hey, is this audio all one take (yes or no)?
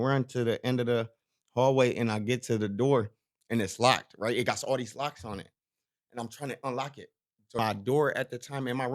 no